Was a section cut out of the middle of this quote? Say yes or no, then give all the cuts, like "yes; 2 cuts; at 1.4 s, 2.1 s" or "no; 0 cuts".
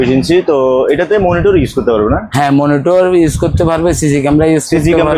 no; 0 cuts